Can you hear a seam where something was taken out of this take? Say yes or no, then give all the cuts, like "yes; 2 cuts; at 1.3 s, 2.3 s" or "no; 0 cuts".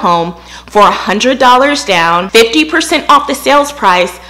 yes; 1 cut; at 2.3 s